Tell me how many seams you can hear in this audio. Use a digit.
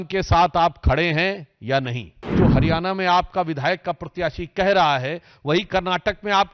1